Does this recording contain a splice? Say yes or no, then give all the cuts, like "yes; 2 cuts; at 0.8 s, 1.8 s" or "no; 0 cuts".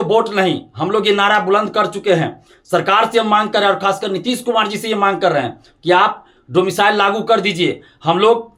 no; 0 cuts